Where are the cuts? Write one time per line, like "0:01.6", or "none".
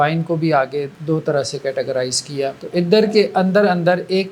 0:00.9
0:02.6

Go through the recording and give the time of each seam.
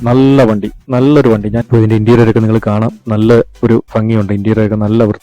0:01.6

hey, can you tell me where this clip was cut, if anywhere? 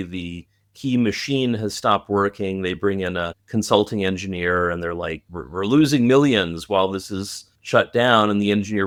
none

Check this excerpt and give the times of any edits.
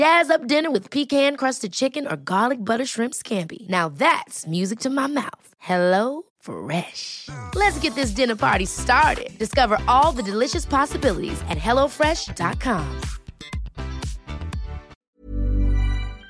0:14.9

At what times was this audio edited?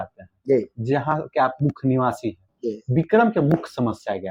none

